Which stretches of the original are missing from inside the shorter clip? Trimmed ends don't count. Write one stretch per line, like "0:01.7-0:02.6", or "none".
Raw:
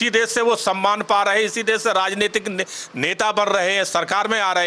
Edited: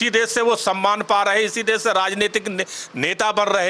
none